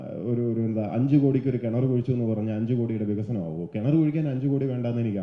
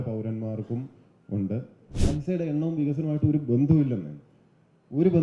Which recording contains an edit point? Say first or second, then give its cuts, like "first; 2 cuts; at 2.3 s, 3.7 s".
second; 1 cut; at 2.0 s